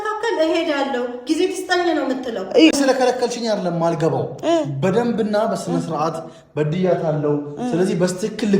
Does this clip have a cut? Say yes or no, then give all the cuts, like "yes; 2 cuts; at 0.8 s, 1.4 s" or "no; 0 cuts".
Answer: yes; 1 cut; at 2.7 s